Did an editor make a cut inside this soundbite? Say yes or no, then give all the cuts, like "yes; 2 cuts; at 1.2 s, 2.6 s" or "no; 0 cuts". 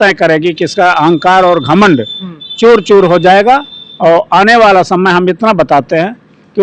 no; 0 cuts